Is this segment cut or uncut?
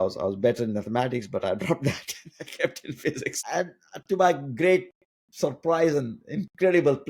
cut